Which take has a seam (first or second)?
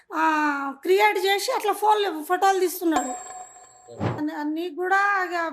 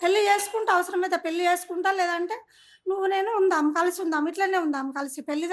first